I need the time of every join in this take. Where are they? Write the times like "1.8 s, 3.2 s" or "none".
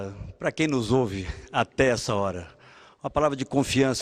2.9 s